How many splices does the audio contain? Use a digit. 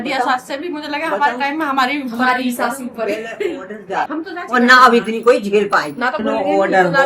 2